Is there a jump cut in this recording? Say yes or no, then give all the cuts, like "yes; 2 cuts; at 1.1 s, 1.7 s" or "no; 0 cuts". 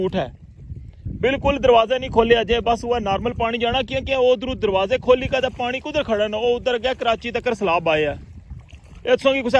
no; 0 cuts